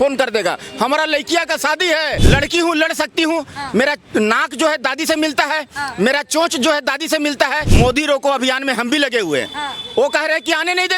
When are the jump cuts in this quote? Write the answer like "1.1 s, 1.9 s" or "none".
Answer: 2.2 s, 7.7 s